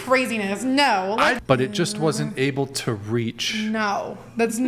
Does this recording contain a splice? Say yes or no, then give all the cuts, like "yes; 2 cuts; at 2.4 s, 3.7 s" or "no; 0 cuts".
yes; 1 cut; at 1.4 s